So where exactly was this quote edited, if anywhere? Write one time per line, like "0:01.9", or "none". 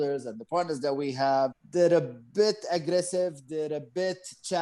0:01.6